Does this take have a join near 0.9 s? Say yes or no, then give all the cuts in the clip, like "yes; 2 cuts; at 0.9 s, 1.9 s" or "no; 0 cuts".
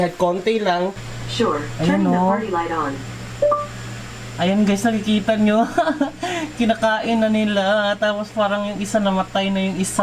yes; 1 cut; at 0.9 s